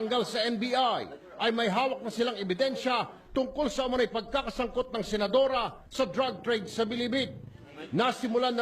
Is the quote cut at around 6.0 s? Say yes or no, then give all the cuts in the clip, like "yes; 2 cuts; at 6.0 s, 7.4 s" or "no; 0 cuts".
no; 1 cut; at 4.1 s